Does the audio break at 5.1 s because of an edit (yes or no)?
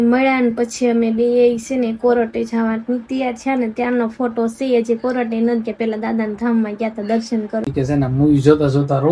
no